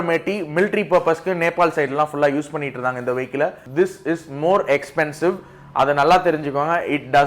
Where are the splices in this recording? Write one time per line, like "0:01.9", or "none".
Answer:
0:03.6